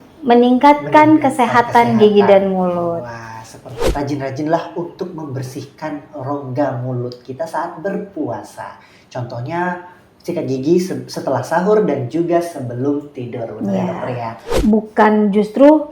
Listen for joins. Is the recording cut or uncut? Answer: cut